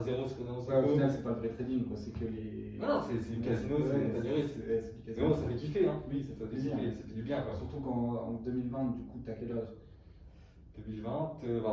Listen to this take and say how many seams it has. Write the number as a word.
zero